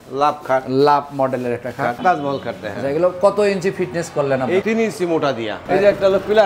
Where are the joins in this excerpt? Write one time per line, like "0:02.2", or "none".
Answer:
0:02.0
0:05.6